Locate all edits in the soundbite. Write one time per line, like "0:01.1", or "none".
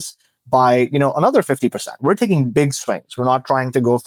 none